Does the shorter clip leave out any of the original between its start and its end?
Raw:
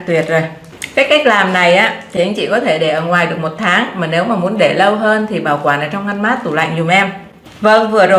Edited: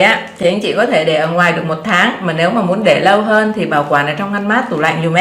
no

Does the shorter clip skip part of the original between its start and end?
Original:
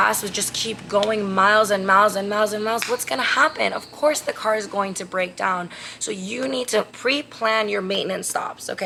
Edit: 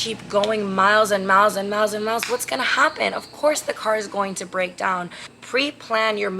yes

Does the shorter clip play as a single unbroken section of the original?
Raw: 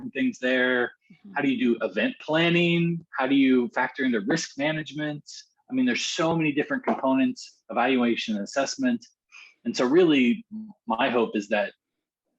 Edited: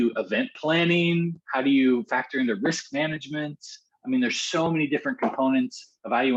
yes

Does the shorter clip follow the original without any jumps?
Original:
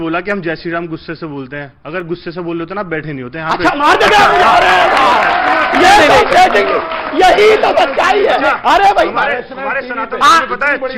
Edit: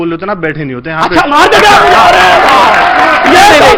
yes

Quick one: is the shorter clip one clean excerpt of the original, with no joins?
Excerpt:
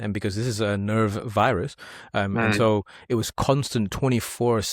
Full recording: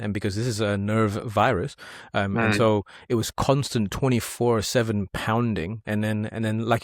yes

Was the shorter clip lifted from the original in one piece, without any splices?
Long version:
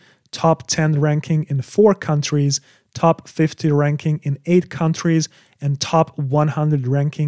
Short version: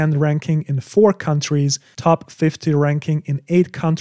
no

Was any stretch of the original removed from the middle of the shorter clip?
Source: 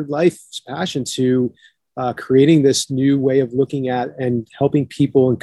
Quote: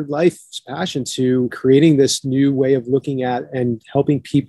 yes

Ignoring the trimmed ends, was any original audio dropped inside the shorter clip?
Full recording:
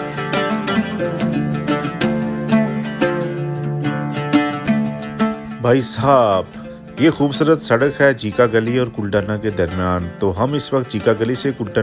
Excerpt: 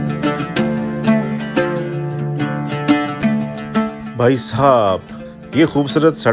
no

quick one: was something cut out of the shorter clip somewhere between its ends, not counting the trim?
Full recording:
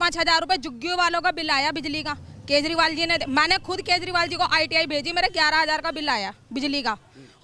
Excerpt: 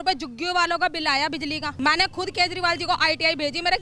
yes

